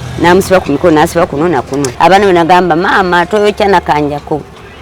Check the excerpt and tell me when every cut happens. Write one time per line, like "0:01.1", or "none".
0:01.8